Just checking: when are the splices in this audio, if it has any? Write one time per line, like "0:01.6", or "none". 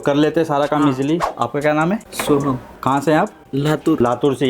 0:01.3
0:02.6